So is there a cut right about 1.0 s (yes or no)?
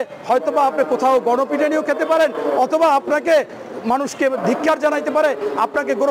no